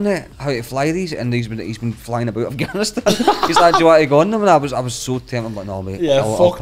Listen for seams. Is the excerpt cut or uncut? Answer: uncut